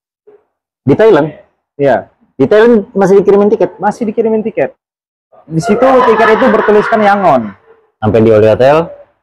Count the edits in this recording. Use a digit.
1